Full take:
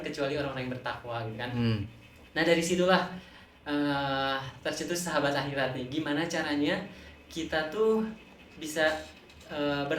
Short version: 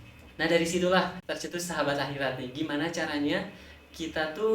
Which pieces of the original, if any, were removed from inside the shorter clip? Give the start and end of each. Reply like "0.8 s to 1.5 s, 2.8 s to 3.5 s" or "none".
3.2 s to 4.6 s